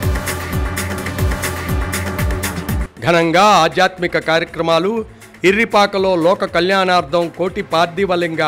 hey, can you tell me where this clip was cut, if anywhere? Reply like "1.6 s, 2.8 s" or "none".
0.9 s